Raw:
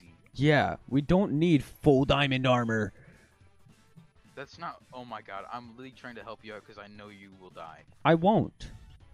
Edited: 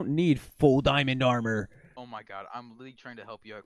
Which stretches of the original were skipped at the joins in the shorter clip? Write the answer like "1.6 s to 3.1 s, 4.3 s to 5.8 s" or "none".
3.1 s to 4.8 s